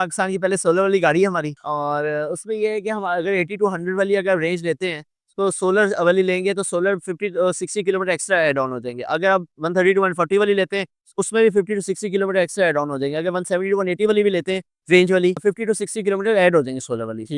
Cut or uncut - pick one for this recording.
uncut